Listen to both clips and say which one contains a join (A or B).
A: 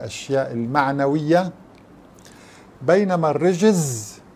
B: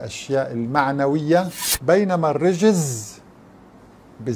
B